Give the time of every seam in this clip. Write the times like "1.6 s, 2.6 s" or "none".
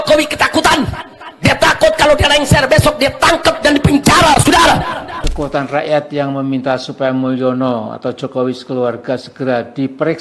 5.2 s